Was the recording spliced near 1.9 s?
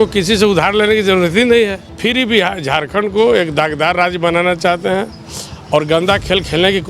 yes; 1 cut; at 1.9 s

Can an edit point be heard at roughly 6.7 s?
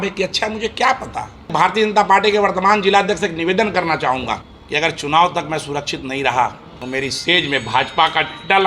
yes; 3 cuts; at 1.5 s, 4.5 s, 6.7 s

